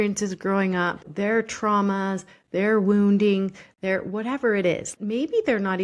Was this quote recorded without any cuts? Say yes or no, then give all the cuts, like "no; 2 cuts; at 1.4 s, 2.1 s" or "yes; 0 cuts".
no; 2 cuts; at 1.1 s, 4.9 s